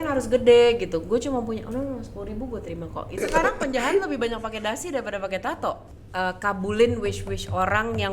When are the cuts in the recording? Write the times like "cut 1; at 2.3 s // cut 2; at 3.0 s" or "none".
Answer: cut 1; at 3.2 s // cut 2; at 5.9 s